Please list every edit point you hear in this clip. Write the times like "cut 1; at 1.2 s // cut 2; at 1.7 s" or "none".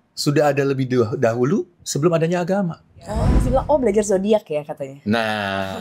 cut 1; at 3.4 s